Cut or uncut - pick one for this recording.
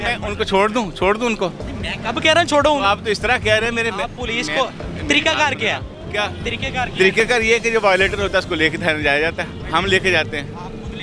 uncut